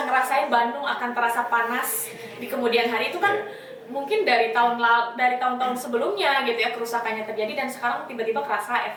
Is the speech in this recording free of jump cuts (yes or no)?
yes